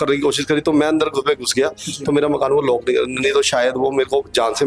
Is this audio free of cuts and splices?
yes; 0 cuts

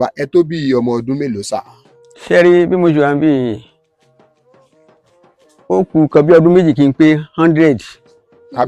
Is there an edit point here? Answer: no; 0 cuts

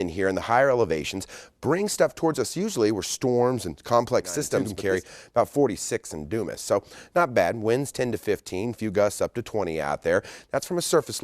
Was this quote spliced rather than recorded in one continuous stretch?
yes; 1 cut; at 4.7 s

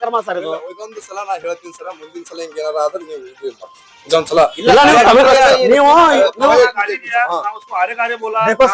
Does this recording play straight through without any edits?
yes; 0 cuts

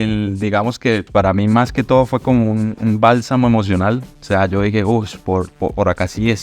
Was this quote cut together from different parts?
yes; 1 cut; at 1.1 s

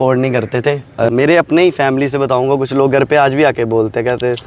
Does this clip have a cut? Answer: yes; 1 cut; at 1.1 s

